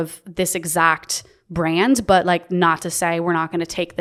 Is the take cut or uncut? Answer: uncut